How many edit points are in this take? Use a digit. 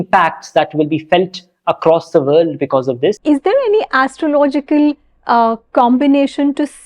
1